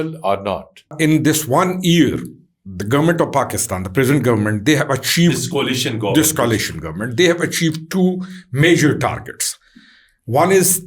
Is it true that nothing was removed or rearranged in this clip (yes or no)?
no